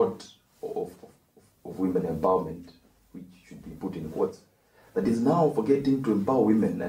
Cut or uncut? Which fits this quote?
uncut